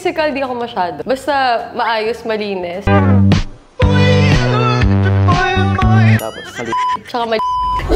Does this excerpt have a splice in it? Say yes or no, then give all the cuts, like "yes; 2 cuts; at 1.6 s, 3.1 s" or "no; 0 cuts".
no; 0 cuts